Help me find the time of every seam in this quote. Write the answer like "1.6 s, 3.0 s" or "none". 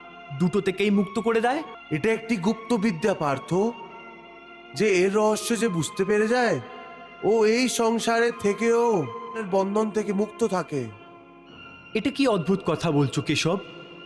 1.7 s, 9.4 s